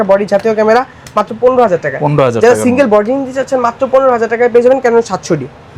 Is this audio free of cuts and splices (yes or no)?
yes